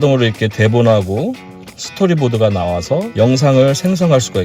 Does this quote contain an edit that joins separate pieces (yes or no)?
yes